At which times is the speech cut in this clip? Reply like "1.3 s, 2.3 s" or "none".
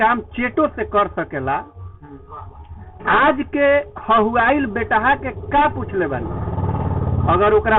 none